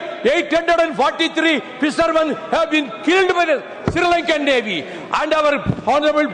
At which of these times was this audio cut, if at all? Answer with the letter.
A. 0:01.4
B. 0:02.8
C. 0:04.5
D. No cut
D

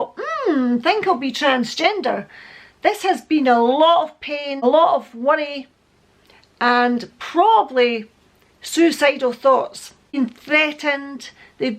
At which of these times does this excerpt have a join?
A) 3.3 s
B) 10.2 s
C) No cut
B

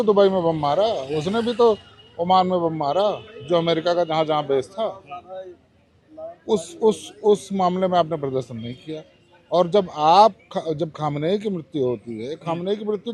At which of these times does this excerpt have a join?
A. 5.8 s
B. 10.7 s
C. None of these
C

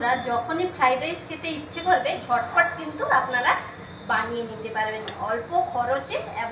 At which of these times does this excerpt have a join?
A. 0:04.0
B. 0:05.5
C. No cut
C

